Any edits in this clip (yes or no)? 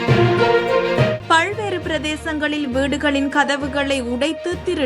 yes